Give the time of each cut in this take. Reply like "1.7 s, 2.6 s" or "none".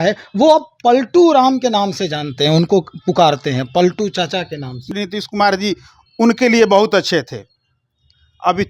4.9 s